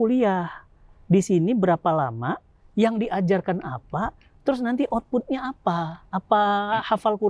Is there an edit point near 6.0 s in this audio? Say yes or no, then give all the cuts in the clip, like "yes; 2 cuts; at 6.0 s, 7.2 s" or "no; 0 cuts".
yes; 1 cut; at 6.0 s